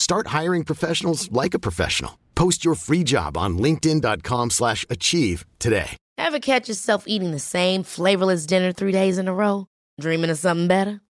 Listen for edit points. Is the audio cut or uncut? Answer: cut